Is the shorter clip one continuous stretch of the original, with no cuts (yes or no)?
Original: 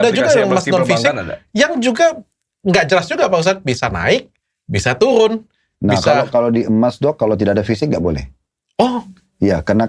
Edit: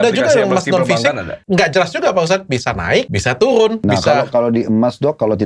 no